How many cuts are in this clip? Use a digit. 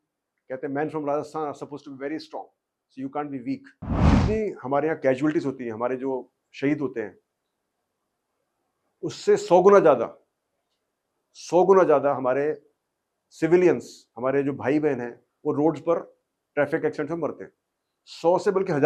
1